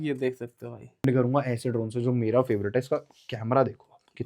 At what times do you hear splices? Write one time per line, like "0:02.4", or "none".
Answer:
0:01.0